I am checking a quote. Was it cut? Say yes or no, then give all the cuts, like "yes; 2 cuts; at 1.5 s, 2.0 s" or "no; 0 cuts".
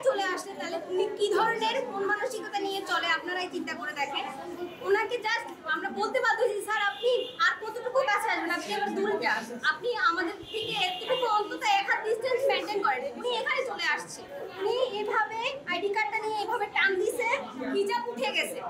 no; 0 cuts